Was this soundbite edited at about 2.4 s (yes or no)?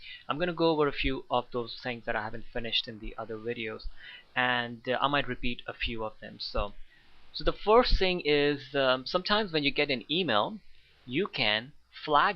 yes